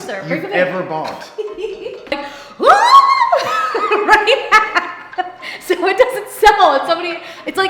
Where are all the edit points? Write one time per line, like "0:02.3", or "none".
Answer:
0:02.0